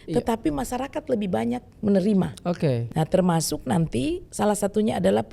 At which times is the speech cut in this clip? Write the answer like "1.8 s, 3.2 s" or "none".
2.8 s, 4.2 s